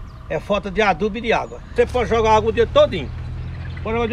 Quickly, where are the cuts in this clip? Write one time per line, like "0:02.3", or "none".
0:01.7